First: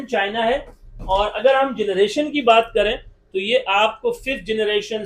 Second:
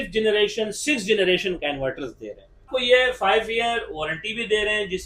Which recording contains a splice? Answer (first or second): second